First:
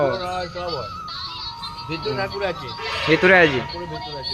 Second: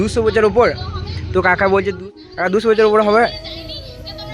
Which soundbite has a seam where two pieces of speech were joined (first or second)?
second